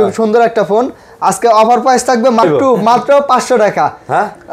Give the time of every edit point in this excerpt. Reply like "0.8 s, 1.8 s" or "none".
2.4 s